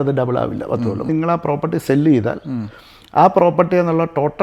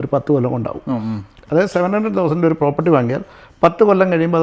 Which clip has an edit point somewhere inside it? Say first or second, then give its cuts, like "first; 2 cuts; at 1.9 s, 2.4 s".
first; 1 cut; at 1.1 s